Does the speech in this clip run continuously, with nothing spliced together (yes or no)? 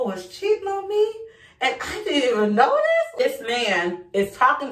no